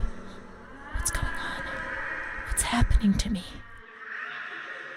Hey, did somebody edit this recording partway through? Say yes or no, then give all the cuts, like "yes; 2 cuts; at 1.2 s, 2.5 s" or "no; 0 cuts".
yes; 1 cut; at 3.6 s